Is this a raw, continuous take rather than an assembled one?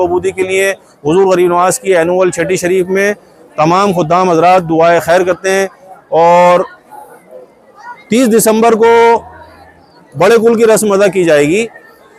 yes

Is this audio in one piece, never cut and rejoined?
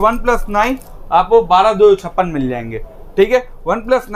yes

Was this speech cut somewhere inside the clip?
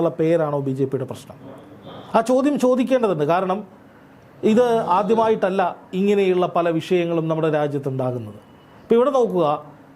no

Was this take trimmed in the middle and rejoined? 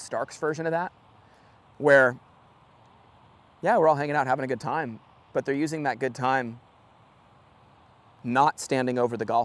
no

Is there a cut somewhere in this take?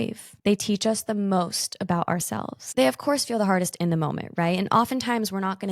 yes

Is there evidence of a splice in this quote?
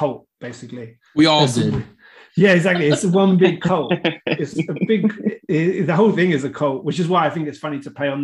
no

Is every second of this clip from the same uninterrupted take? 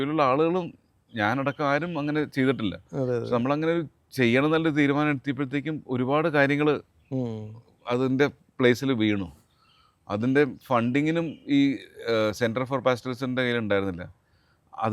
yes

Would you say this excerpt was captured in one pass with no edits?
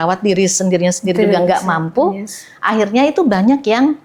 yes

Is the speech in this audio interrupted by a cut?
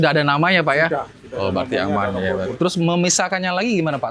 yes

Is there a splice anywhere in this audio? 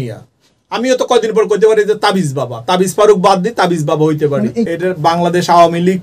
yes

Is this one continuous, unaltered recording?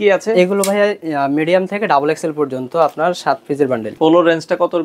no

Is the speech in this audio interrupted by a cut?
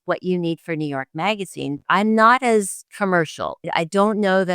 yes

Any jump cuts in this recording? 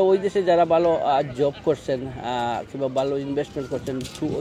no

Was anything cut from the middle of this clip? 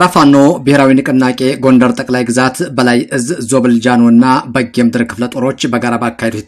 no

